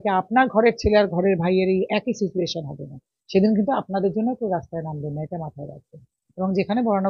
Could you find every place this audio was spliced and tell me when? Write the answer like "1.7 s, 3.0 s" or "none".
6.2 s